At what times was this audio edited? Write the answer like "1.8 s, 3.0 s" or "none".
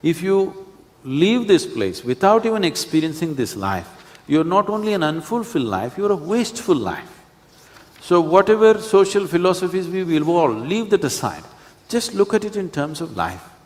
none